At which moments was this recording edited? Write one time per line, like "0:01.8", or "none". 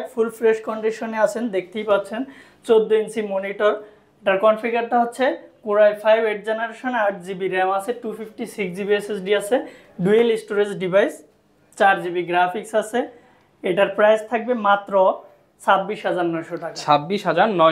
none